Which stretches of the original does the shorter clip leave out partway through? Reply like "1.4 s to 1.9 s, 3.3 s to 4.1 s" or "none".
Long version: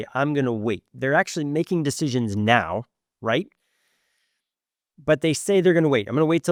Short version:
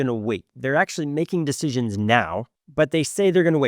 3.0 s to 4.9 s